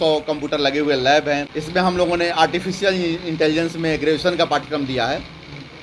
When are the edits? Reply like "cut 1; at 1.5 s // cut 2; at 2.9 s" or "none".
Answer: cut 1; at 1.5 s